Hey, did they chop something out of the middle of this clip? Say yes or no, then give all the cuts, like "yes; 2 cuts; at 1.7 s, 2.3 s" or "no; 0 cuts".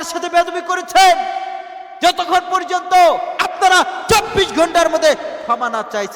no; 0 cuts